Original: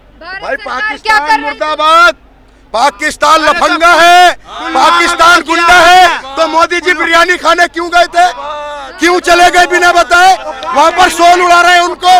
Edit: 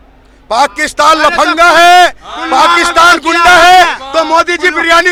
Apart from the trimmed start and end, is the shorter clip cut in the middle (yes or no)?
no